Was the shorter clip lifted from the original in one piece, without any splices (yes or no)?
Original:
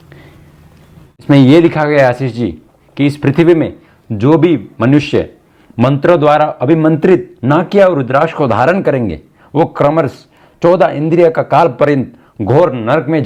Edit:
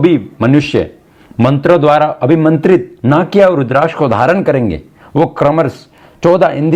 yes